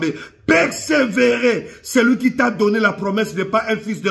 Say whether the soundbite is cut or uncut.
uncut